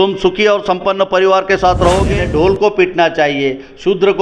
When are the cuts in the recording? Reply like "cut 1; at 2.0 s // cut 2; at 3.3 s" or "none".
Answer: cut 1; at 2.1 s